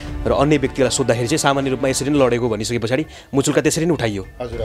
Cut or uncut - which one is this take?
uncut